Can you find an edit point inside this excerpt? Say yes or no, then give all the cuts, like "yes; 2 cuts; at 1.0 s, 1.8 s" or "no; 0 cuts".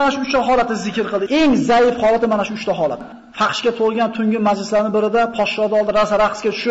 yes; 2 cuts; at 1.2 s, 3.1 s